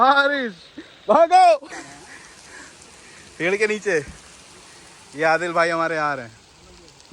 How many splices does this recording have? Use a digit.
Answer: 1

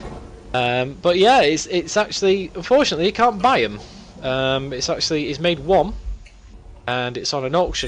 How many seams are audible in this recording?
1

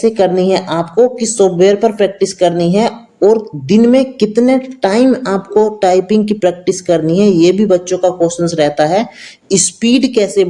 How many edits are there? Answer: 0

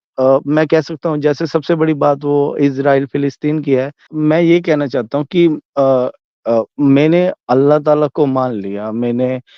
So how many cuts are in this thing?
1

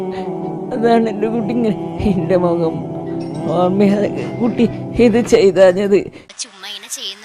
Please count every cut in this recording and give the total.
1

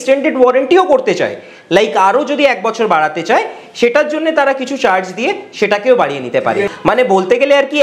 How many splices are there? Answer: 1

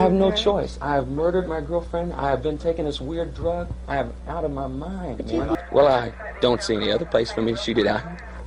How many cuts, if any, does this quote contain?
1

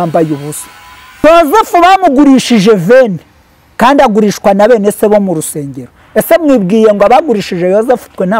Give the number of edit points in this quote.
1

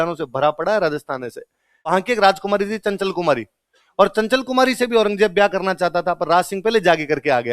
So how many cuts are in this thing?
1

